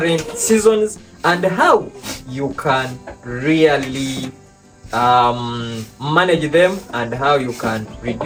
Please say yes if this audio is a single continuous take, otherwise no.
yes